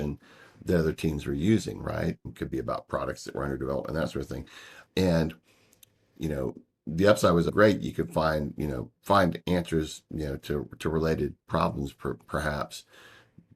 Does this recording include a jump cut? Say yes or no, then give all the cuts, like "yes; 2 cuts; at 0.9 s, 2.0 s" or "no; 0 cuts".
no; 0 cuts